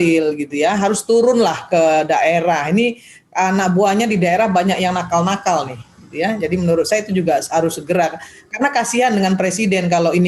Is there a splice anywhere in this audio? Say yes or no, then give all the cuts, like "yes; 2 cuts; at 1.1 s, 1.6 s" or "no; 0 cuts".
no; 0 cuts